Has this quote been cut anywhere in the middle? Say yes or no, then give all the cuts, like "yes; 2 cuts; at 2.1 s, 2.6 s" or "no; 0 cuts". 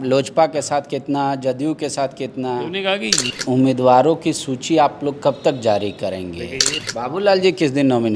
yes; 2 cuts; at 3.2 s, 6.8 s